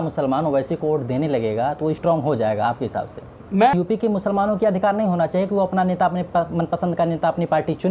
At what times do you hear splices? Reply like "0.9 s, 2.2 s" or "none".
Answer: 3.7 s

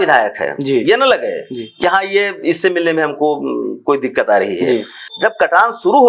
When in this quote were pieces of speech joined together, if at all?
5.0 s

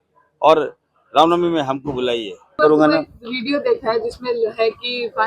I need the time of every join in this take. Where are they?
2.6 s

